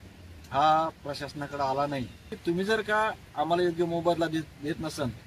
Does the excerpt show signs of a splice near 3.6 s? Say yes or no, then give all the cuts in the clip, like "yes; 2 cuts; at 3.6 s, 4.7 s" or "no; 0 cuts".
no; 1 cut; at 2.4 s